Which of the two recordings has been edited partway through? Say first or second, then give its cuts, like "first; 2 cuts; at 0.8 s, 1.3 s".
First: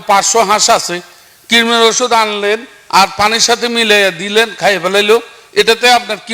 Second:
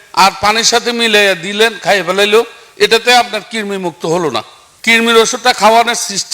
second; 1 cut; at 4.8 s